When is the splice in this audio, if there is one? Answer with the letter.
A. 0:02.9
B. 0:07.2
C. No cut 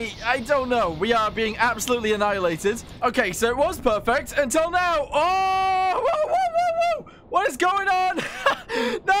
A